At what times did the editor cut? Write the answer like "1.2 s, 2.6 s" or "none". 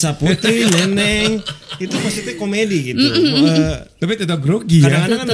none